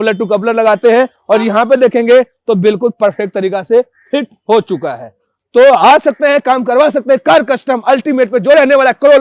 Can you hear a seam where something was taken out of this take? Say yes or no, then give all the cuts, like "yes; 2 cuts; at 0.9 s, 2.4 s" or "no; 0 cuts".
no; 0 cuts